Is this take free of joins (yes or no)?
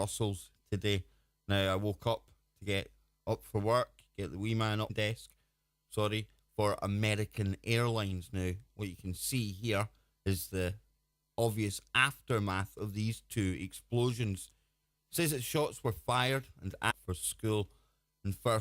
yes